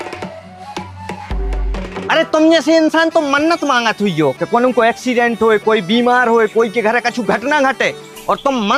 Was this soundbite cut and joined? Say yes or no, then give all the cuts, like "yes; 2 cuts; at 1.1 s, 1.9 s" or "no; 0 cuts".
yes; 1 cut; at 2.1 s